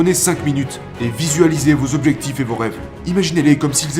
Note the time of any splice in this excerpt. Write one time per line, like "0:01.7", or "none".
none